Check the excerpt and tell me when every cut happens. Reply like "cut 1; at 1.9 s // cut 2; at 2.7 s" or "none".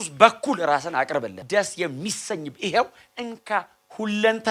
cut 1; at 1.4 s